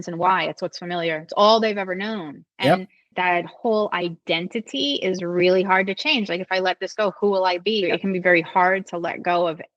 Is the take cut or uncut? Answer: cut